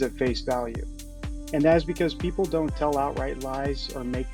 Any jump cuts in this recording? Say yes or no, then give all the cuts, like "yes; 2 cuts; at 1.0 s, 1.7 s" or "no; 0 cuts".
no; 0 cuts